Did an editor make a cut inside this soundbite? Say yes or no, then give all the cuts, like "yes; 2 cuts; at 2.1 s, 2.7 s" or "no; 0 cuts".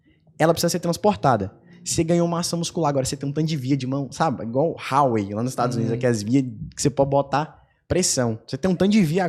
no; 0 cuts